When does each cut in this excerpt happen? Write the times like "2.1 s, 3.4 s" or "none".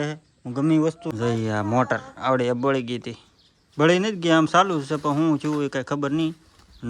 1.0 s